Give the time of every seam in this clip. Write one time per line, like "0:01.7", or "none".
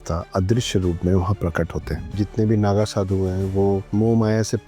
0:02.1
0:03.9